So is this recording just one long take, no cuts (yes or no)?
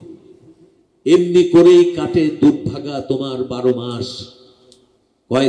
yes